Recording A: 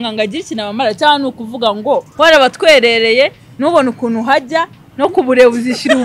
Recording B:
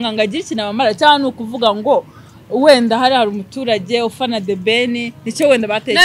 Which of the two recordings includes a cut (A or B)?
A